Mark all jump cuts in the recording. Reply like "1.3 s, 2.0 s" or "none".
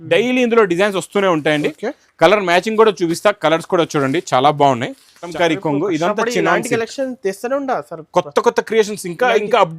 5.3 s